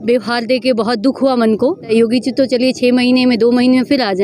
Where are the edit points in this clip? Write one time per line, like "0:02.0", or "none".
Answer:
0:01.8